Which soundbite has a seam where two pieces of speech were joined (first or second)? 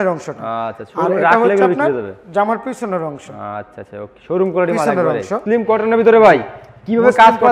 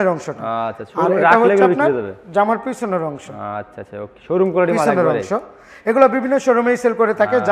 first